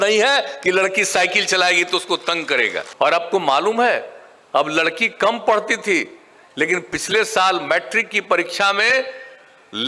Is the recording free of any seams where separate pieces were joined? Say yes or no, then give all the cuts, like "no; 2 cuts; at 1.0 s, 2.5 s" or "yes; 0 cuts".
no; 1 cut; at 2.8 s